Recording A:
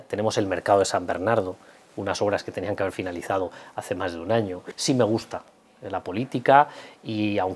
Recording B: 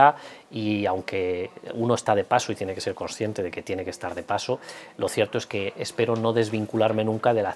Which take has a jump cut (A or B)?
A